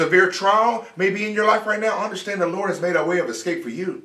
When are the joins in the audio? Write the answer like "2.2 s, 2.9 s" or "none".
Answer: none

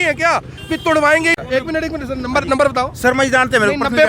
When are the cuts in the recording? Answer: 1.4 s

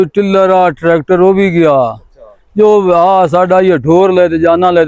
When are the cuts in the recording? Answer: none

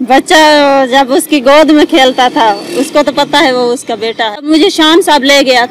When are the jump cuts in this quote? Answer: 4.4 s

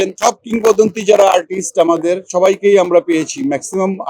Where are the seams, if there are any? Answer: 2.3 s

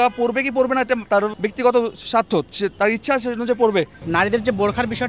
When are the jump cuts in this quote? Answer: 1.2 s, 4.0 s

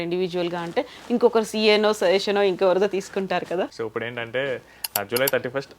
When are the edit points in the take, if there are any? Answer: 3.8 s

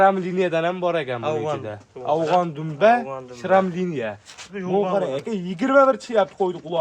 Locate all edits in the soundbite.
4.5 s

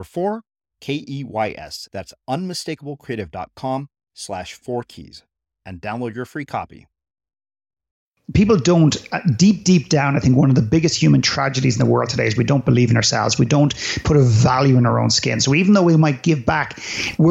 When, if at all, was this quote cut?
8.3 s

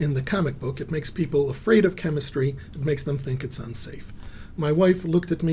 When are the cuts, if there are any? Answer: none

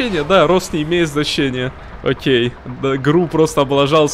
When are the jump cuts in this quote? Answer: none

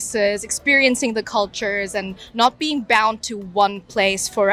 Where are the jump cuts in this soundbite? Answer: none

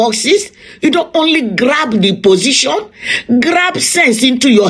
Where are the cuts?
none

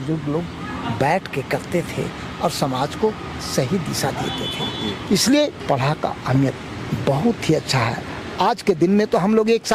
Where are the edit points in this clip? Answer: none

